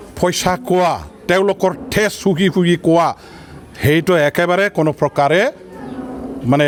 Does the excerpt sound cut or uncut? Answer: uncut